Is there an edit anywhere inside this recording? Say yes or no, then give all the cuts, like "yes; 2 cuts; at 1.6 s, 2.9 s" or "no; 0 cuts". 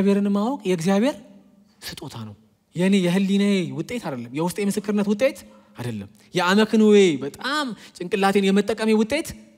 yes; 1 cut; at 2.5 s